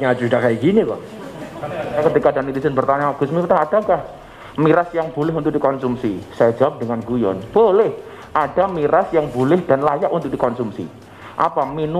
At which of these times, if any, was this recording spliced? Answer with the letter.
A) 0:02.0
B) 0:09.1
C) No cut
A